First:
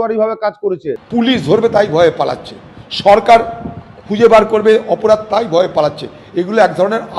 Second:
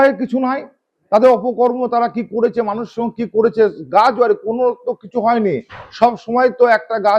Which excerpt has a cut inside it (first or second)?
first